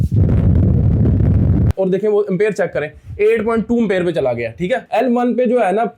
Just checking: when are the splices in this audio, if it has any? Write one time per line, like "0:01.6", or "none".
0:01.7
0:04.9